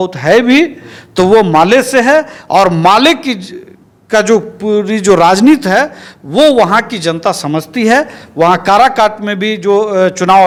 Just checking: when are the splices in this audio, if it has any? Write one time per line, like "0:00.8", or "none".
none